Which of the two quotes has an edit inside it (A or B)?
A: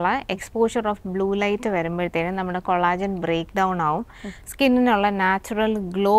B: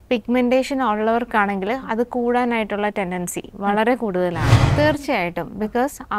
B